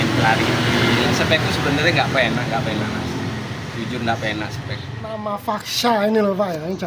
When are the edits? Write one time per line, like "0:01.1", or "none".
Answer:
0:05.2